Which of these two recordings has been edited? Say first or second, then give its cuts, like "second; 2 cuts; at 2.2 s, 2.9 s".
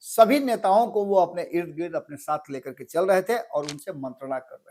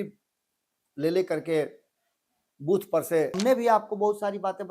second; 1 cut; at 3.4 s